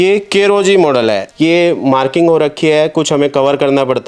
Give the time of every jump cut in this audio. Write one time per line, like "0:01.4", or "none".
0:01.3